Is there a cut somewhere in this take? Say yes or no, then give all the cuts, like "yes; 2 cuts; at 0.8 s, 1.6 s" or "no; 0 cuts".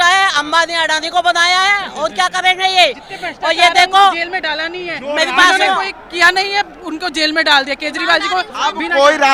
no; 0 cuts